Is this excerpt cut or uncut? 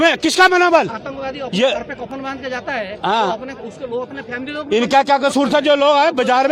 uncut